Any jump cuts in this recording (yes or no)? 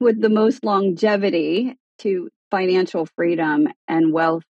yes